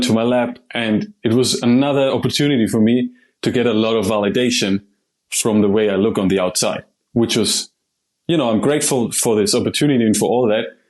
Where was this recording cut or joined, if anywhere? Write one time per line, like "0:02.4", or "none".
none